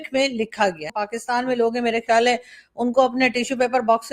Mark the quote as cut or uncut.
cut